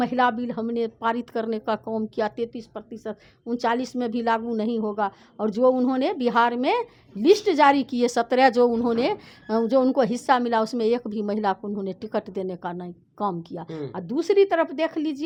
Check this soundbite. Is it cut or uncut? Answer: uncut